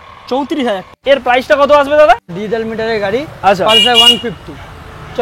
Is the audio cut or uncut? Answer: cut